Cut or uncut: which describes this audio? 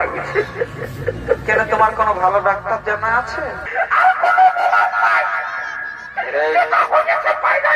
cut